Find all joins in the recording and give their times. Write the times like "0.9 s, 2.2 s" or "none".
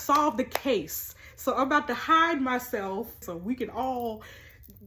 3.3 s